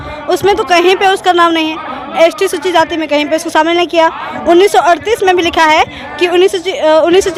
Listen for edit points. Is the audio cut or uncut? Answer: uncut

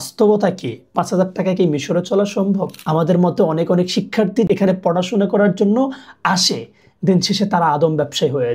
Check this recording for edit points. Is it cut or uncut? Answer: cut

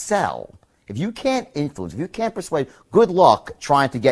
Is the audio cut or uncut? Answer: uncut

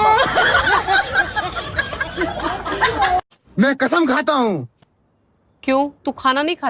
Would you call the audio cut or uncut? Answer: uncut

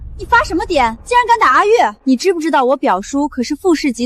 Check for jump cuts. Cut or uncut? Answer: cut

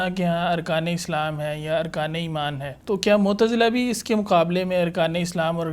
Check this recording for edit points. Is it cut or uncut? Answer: cut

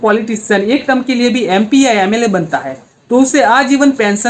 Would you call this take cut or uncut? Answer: uncut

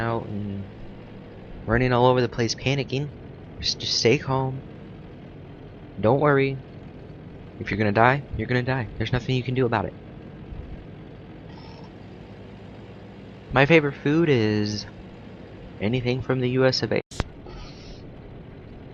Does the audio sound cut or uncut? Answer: uncut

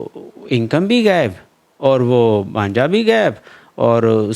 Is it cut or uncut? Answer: uncut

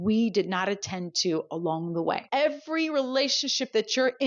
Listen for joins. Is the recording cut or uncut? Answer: cut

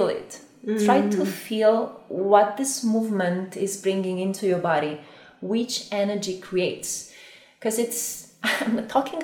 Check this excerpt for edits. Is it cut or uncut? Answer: uncut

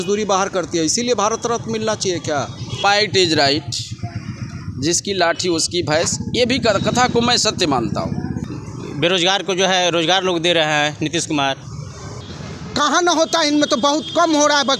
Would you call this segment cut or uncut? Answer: cut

